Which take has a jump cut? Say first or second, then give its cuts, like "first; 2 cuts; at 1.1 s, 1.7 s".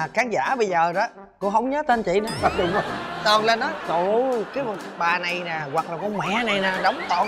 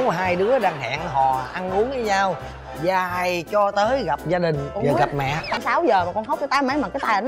second; 1 cut; at 5.6 s